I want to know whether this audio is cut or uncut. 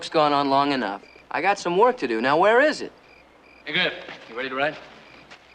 cut